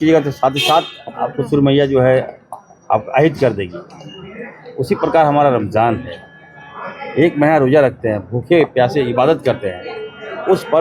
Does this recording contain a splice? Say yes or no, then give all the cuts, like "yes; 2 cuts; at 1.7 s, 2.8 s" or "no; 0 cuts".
no; 0 cuts